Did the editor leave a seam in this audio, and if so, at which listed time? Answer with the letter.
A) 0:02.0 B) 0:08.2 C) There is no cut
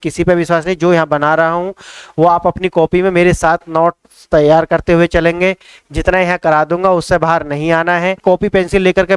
B